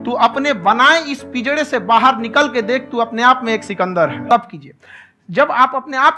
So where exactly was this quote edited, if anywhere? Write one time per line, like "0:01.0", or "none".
0:04.3